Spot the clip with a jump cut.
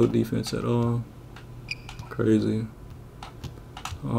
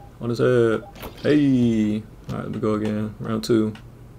second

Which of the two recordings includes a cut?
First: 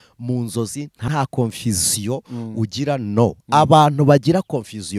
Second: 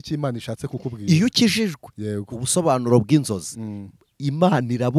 first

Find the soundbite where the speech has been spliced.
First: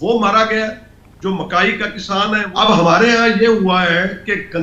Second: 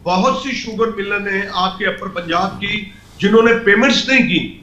first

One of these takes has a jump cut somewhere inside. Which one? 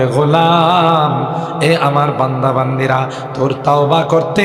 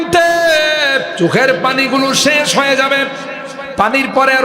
second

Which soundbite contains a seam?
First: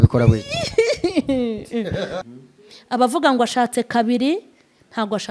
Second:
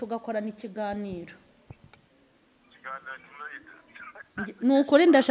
first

